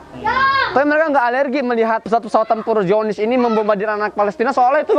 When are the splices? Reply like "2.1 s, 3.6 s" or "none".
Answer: 2.0 s